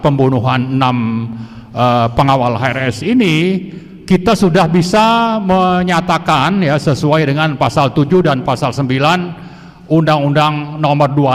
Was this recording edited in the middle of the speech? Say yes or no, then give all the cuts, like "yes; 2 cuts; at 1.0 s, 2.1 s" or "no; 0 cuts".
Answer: no; 0 cuts